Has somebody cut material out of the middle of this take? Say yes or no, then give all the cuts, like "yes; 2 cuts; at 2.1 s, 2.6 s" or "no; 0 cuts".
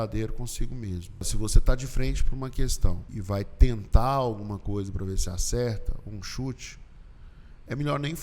yes; 2 cuts; at 1.3 s, 3.1 s